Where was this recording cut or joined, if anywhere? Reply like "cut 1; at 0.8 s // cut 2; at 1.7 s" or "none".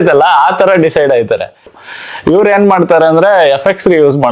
cut 1; at 1.8 s